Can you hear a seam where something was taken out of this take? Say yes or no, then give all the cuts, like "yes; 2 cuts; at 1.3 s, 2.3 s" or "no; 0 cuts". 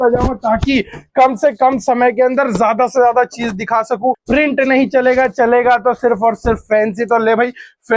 yes; 1 cut; at 4.2 s